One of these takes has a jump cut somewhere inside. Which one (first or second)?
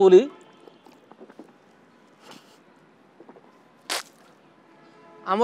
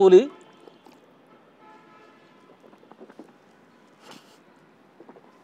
first